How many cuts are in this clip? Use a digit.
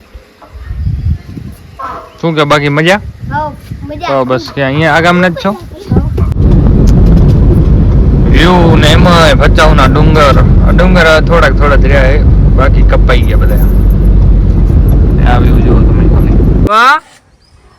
2